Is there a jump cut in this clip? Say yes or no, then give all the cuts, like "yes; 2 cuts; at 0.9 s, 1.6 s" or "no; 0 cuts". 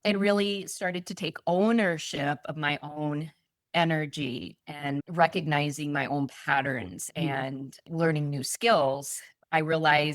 yes; 1 cut; at 5.0 s